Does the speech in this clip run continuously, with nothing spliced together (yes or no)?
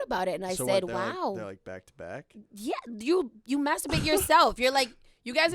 yes